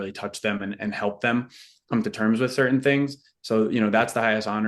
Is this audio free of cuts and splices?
yes; 0 cuts

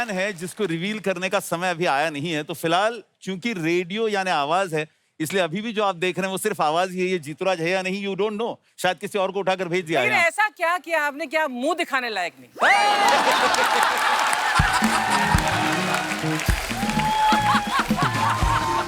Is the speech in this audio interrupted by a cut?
no; 0 cuts

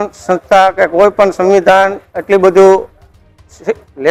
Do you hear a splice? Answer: no; 0 cuts

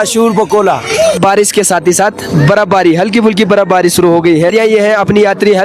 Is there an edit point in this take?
yes; 2 cuts; at 1.2 s, 4.5 s

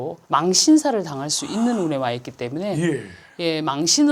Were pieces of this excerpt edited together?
no; 0 cuts

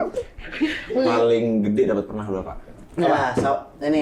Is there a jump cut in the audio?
yes; 1 cut; at 1.2 s

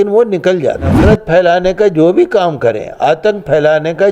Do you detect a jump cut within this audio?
yes; 1 cut; at 0.9 s

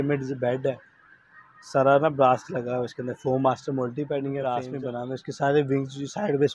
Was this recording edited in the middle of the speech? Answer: yes; 1 cut; at 4.7 s

